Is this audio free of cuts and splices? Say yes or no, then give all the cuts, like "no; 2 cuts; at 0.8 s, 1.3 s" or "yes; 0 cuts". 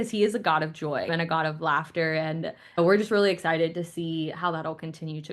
no; 2 cuts; at 1.1 s, 2.8 s